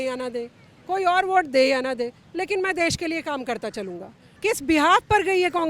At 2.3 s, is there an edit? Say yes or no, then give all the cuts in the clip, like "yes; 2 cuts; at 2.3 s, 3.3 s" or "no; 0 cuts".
no; 1 cut; at 4.2 s